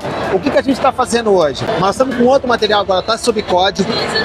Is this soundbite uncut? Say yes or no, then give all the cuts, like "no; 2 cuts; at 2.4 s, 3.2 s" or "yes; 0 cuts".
no; 1 cut; at 1.6 s